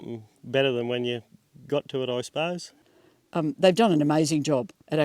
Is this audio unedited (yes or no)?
no